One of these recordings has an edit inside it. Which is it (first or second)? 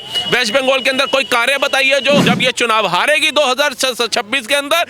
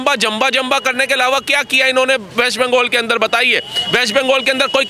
first